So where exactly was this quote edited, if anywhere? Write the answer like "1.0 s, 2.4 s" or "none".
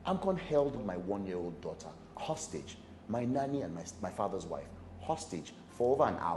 0.8 s, 2.0 s